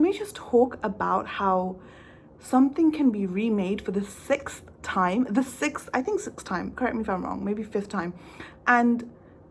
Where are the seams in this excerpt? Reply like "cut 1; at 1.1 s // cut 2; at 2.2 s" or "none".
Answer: none